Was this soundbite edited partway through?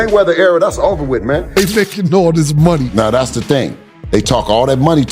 yes; 1 cut; at 1.6 s

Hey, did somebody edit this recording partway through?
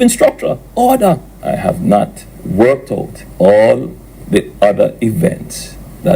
yes; 1 cut; at 0.9 s

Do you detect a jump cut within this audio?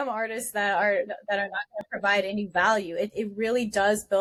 no; 0 cuts

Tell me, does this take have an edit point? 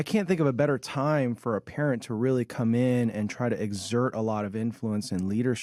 no; 0 cuts

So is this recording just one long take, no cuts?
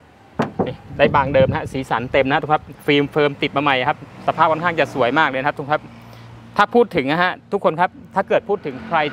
yes; 0 cuts

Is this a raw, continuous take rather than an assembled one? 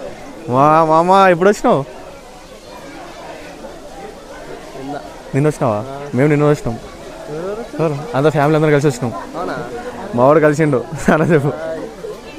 yes; 0 cuts

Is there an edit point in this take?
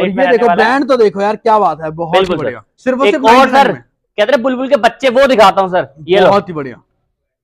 yes; 1 cut; at 2.7 s

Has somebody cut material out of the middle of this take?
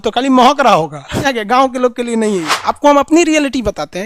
yes; 2 cuts; at 1.3 s, 2.5 s

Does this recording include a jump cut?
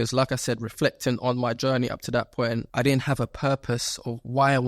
yes; 1 cut; at 2.7 s

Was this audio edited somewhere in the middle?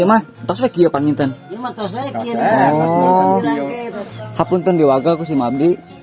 yes; 1 cut; at 3.9 s

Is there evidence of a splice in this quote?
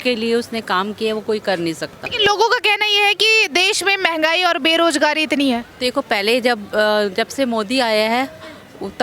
no; 0 cuts

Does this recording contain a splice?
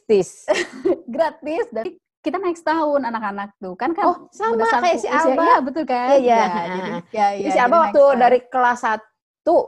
yes; 1 cut; at 2.0 s

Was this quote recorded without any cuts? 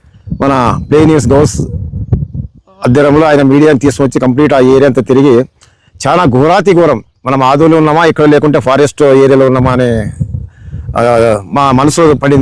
yes; 0 cuts

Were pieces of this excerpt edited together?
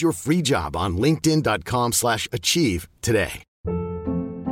yes; 1 cut; at 3.5 s

